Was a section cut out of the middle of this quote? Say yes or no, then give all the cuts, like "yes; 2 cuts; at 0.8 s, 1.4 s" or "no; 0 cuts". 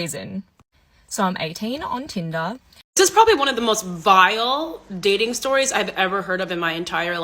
yes; 1 cut; at 2.8 s